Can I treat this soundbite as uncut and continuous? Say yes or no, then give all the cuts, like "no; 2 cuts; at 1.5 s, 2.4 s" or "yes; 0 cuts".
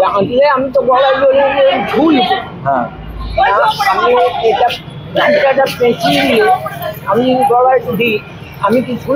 yes; 0 cuts